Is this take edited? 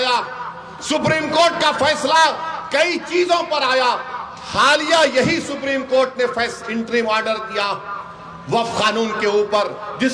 no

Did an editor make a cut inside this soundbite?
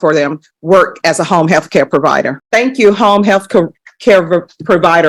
no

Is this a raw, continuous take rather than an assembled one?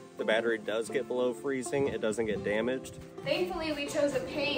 no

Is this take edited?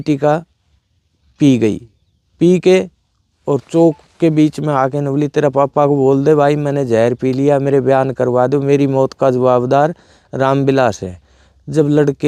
no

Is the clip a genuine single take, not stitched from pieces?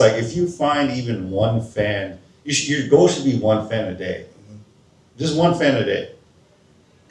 yes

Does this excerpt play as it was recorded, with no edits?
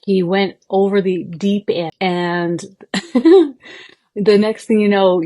no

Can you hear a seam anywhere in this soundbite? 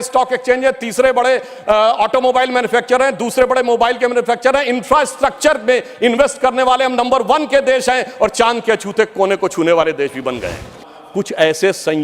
yes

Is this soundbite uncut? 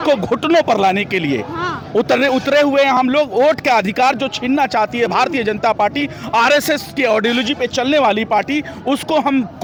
yes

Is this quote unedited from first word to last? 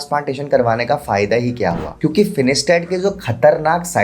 no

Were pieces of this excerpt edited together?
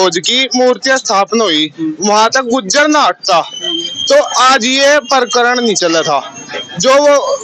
no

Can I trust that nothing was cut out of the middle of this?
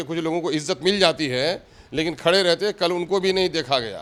yes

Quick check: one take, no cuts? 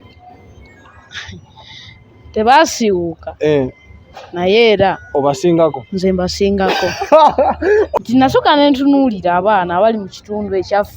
no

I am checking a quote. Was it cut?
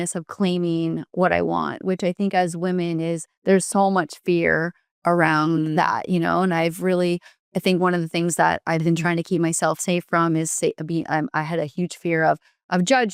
no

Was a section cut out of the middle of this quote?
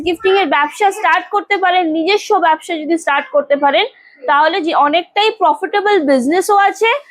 no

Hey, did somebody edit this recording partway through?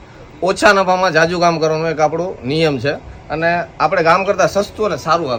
no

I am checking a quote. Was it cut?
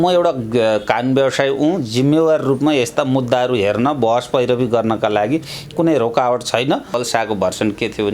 yes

